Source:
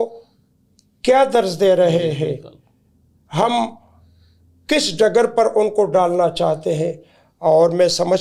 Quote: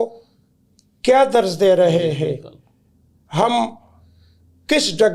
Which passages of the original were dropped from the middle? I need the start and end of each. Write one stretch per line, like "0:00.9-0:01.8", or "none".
none

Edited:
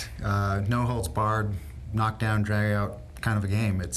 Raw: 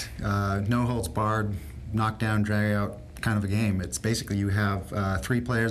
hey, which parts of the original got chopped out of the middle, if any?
none

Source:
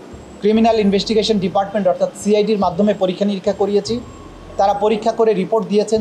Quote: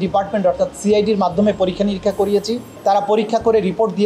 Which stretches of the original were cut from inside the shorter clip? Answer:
0:04.0-0:04.4

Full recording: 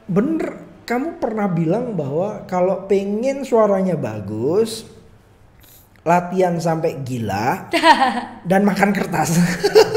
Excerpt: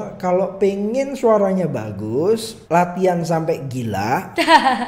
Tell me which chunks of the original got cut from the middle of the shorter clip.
0:04.8-0:05.9

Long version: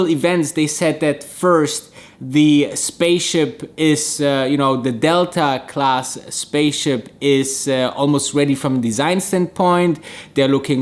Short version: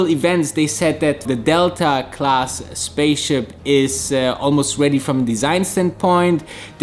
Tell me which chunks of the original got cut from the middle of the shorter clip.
0:01.2-0:04.8

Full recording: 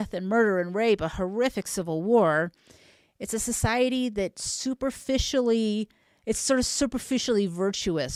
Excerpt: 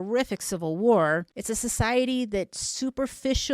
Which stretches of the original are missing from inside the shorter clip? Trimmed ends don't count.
0:02.6-0:03.2

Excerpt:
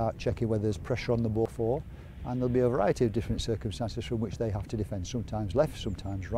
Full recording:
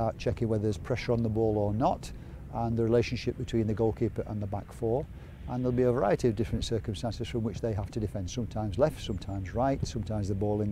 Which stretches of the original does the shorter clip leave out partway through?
0:01.5-0:04.7

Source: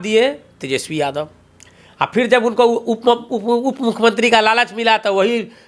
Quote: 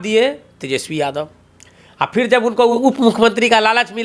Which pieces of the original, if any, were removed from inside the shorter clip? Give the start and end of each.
0:02.8-0:03.6

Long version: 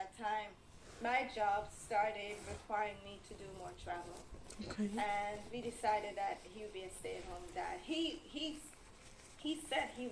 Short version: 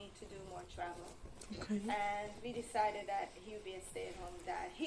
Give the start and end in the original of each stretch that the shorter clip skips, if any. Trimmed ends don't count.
none

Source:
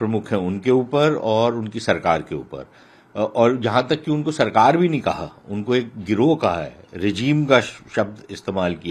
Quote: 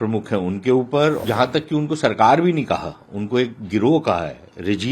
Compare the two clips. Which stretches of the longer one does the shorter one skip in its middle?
0:01.2-0:03.6

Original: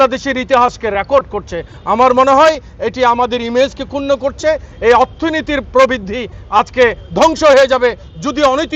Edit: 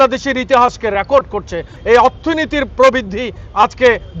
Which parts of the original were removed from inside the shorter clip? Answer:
0:01.7-0:04.7

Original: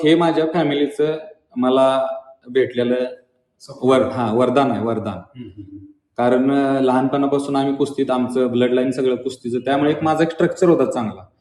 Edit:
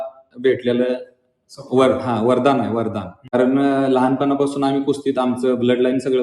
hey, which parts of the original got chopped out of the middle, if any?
0:05.4-0:06.3

